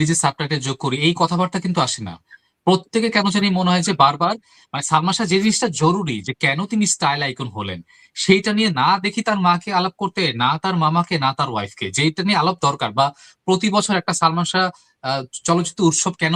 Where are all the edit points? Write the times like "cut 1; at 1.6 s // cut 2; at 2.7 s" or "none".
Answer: none